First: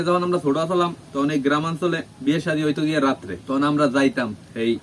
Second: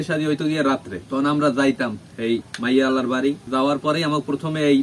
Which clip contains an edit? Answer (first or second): second